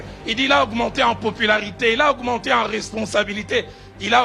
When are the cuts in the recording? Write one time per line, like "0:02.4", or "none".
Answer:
none